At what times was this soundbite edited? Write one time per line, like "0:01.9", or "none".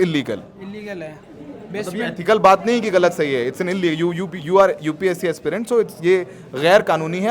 none